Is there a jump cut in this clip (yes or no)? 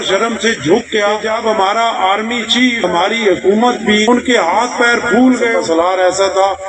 yes